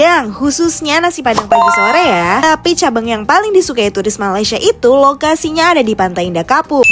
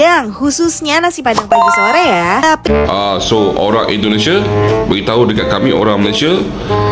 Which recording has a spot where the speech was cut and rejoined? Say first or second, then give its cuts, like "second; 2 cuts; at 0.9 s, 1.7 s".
second; 1 cut; at 2.6 s